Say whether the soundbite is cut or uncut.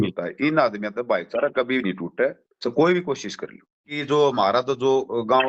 cut